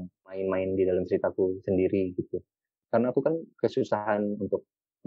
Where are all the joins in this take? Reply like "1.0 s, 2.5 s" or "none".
2.6 s